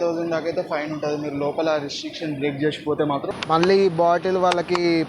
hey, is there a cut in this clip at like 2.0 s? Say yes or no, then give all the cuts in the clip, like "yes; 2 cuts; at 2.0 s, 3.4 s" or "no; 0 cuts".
no; 1 cut; at 3.3 s